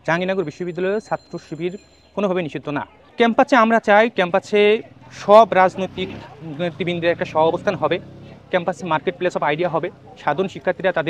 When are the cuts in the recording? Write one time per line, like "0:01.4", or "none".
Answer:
0:03.0